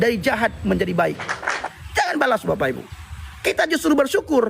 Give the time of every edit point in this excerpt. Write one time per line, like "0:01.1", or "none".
0:01.6